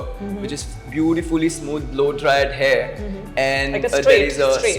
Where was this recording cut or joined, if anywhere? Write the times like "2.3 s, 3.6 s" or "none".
none